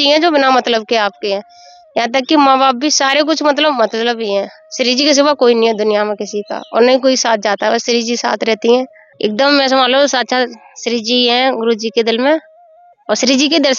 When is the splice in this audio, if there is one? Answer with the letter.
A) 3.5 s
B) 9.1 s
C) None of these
B